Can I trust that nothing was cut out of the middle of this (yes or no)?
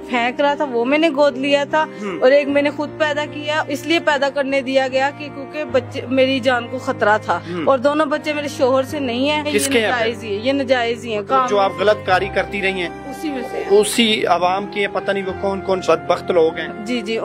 no